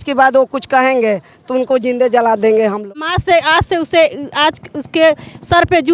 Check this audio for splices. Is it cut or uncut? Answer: cut